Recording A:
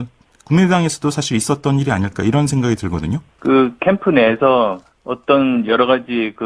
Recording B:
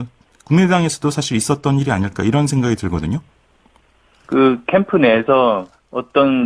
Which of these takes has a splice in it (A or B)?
A